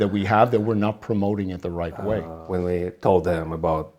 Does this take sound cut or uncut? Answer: cut